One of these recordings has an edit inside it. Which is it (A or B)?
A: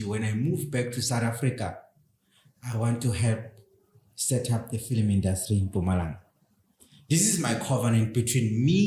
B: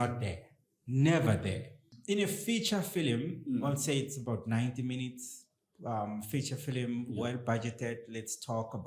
B